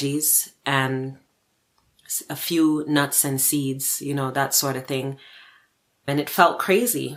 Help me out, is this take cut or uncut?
uncut